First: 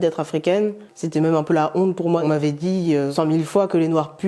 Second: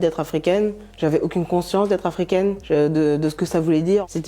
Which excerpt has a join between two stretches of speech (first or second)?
first